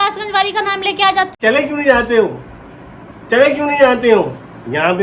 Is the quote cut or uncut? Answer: cut